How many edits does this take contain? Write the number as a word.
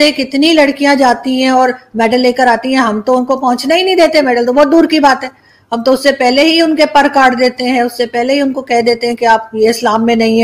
zero